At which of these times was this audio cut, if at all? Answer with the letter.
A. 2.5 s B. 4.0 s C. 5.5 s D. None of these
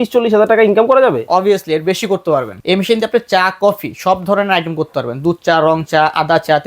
A